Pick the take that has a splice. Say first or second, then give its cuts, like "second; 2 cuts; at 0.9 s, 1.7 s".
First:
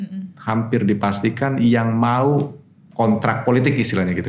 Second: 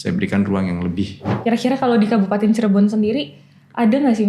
second; 1 cut; at 1.3 s